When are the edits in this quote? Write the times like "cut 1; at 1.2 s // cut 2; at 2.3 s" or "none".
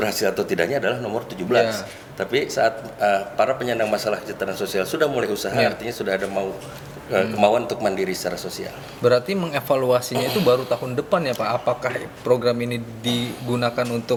none